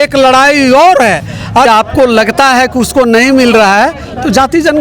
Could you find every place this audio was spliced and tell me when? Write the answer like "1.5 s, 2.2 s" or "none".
1.7 s